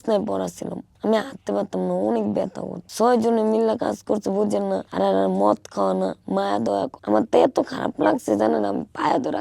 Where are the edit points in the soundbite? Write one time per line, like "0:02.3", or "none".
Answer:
0:04.9
0:07.0